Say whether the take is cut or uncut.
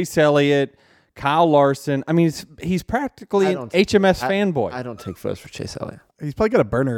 cut